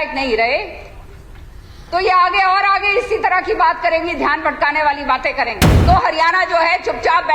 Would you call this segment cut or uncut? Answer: cut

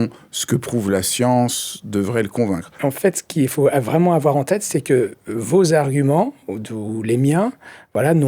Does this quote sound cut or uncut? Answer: cut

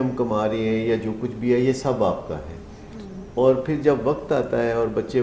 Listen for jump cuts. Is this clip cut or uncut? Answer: uncut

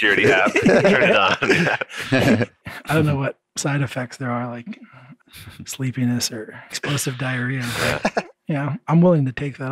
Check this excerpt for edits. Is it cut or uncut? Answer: cut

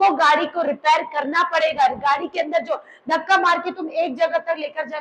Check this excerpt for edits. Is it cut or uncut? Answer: uncut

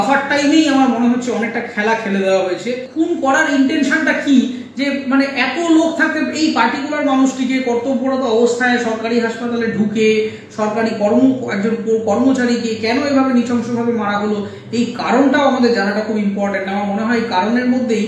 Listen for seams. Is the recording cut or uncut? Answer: cut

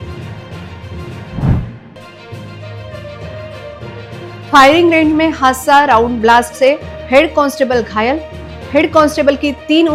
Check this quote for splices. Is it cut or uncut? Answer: uncut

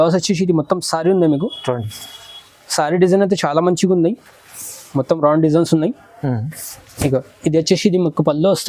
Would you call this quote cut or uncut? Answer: uncut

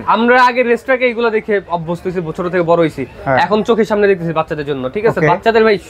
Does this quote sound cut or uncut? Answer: uncut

